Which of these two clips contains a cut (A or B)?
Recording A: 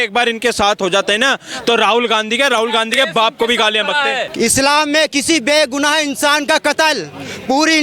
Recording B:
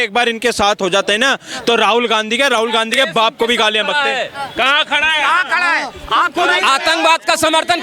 A